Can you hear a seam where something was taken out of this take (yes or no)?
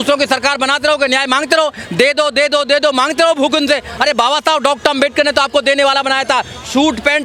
no